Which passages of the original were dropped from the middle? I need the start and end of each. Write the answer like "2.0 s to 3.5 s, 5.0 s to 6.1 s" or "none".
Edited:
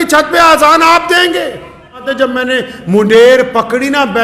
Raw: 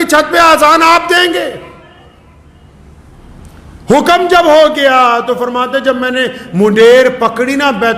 2.0 s to 5.7 s

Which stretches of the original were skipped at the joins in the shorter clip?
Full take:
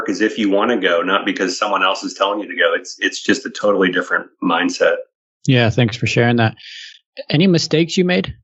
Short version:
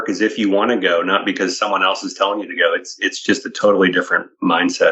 none

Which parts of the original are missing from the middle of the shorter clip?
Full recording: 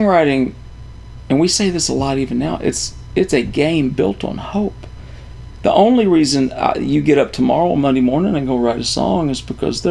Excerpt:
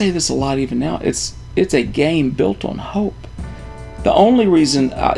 none

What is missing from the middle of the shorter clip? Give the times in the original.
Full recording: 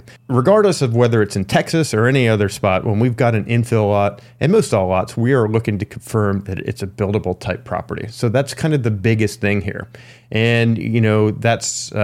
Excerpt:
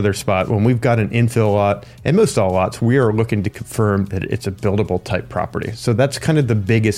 none

